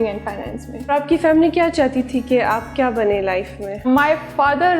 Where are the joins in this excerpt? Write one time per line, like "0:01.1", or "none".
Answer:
0:00.9
0:03.8